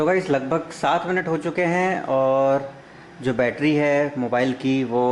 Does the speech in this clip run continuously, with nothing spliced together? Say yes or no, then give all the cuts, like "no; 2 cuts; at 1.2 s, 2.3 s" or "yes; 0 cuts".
yes; 0 cuts